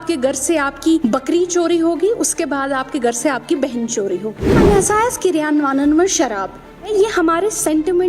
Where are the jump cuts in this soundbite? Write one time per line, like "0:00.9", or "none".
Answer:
0:01.0
0:04.5
0:06.9